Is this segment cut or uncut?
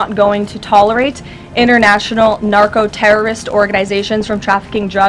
uncut